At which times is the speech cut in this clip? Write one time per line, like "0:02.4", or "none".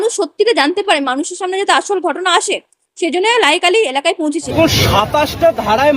0:04.5